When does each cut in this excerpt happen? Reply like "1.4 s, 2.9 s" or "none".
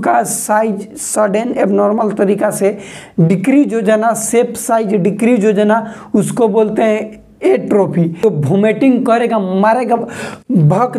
8.2 s